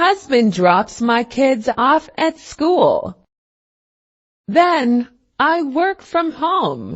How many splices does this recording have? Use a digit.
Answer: 1